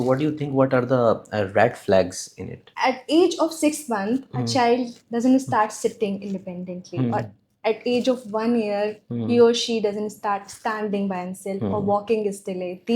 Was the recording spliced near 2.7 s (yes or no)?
yes